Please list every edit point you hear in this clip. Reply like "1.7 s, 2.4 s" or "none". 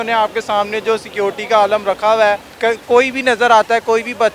2.5 s